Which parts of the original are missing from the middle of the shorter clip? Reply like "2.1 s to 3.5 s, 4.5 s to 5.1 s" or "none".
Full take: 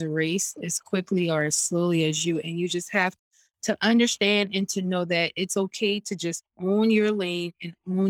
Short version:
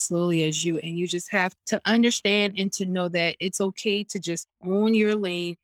3.2 s to 3.5 s

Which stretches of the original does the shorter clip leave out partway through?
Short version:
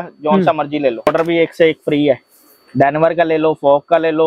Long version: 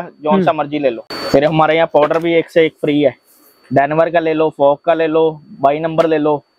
1.1 s to 2.0 s

